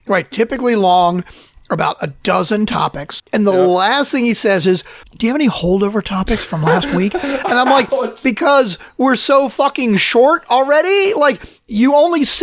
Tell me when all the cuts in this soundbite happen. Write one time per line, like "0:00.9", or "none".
0:03.1